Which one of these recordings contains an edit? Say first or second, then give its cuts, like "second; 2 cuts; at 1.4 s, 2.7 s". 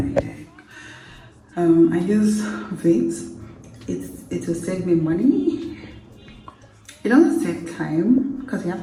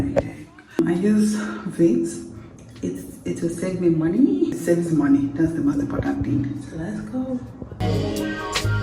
second; 3 cuts; at 0.8 s, 4.6 s, 7.8 s